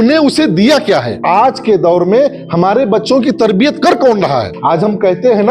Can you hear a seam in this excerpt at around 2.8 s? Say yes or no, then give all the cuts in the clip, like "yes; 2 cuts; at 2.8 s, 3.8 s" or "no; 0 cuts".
no; 2 cuts; at 1.1 s, 4.5 s